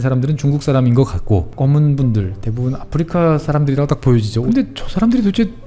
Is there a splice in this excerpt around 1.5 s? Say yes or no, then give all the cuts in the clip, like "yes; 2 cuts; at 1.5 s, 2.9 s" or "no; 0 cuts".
yes; 2 cuts; at 1.5 s, 4.4 s